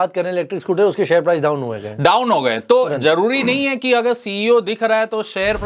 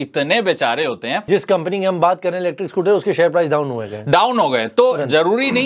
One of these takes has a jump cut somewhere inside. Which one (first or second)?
second